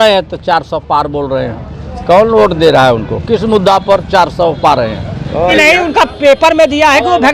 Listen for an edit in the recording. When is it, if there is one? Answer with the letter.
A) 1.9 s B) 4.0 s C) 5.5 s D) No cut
C